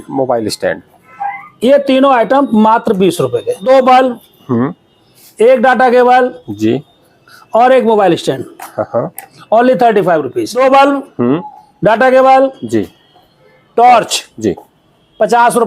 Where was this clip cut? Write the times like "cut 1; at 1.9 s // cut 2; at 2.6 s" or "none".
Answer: cut 1; at 3.6 s // cut 2; at 10.4 s

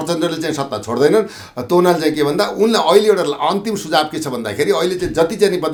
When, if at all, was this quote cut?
none

